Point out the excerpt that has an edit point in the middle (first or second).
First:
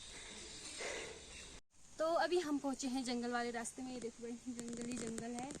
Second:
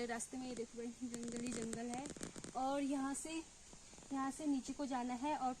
first